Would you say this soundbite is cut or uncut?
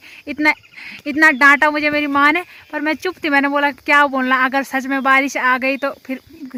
uncut